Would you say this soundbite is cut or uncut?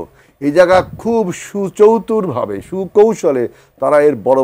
uncut